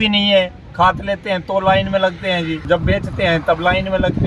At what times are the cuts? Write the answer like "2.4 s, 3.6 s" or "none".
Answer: 2.6 s